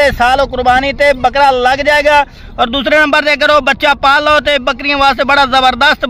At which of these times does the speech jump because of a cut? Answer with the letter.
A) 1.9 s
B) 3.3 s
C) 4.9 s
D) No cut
D